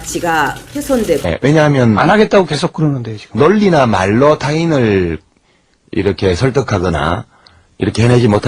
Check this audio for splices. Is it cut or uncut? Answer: uncut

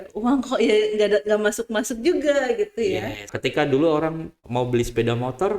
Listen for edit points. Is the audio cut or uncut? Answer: cut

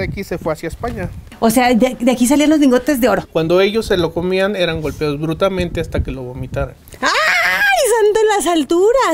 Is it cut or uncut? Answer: cut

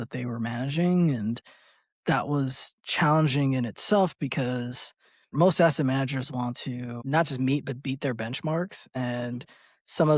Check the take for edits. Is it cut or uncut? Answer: cut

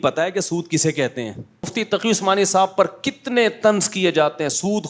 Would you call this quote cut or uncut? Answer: cut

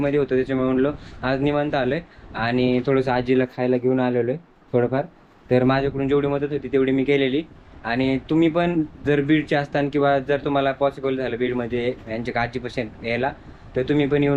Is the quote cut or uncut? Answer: uncut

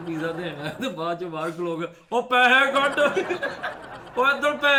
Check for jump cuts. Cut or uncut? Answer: uncut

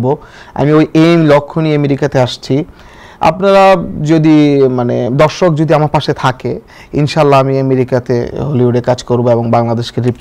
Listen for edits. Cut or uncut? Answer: uncut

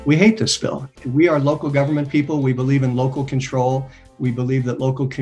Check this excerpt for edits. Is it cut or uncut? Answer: cut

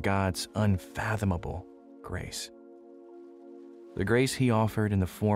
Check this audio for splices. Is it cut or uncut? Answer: uncut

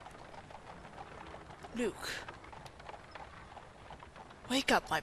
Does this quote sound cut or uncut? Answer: cut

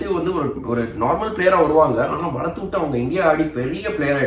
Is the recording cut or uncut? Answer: uncut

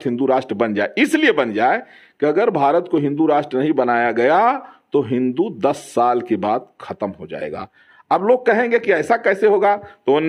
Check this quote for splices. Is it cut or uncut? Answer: uncut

